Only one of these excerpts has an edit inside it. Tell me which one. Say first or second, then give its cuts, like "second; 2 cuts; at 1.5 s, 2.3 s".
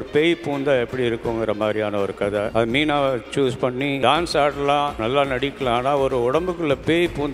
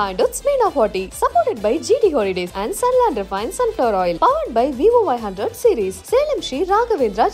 first; 3 cuts; at 2.5 s, 4.0 s, 5.0 s